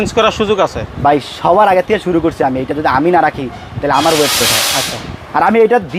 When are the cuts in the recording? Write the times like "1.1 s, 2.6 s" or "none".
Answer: none